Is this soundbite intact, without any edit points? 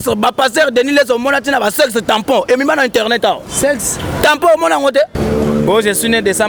no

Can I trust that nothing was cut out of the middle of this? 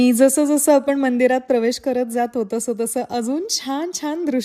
yes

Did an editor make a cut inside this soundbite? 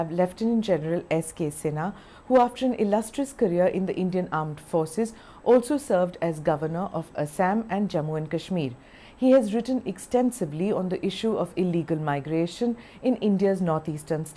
no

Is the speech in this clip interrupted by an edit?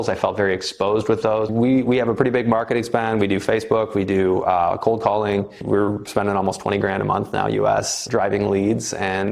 yes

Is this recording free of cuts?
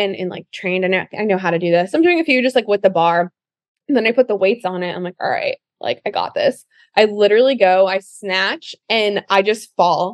yes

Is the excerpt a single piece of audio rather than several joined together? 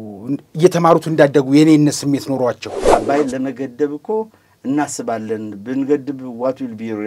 no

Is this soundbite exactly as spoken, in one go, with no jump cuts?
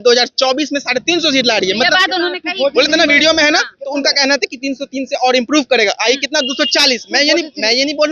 yes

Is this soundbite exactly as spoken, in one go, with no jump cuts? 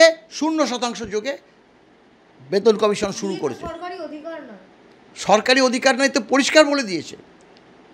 yes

